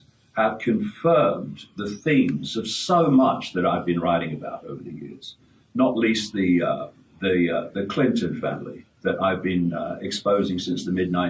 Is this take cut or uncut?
uncut